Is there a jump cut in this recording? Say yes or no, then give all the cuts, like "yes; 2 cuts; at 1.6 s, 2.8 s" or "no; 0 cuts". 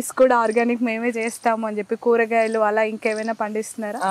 no; 0 cuts